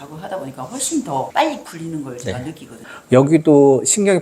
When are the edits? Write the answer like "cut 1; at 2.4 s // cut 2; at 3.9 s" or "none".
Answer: cut 1; at 2.8 s